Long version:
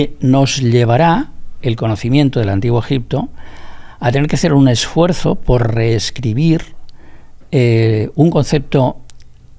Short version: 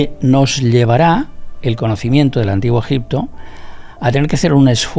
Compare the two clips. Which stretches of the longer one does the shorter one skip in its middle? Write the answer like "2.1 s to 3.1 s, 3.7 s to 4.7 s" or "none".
none